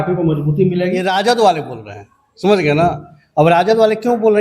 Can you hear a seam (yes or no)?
yes